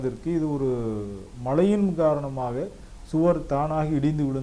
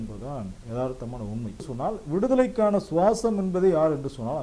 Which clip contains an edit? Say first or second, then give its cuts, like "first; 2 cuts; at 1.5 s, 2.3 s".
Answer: second; 1 cut; at 1.7 s